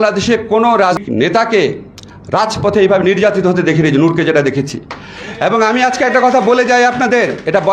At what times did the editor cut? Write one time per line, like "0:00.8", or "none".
0:01.0